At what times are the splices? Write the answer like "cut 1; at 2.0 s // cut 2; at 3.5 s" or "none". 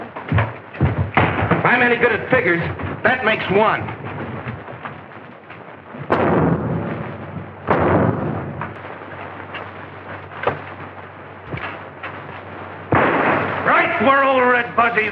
cut 1; at 8.8 s